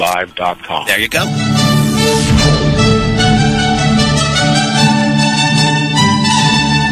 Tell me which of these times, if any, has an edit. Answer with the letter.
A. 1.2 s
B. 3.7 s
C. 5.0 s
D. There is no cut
D